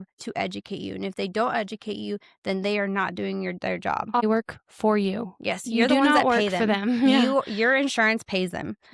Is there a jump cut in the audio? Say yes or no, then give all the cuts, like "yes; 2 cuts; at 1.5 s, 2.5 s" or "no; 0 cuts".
no; 0 cuts